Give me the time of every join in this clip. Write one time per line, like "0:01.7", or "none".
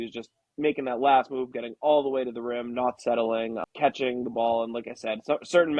0:03.6